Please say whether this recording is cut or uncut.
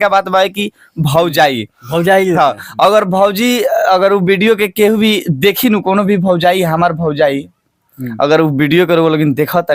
uncut